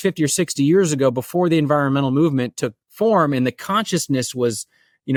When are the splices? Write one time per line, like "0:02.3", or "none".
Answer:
none